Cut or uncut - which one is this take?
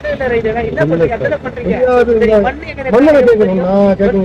cut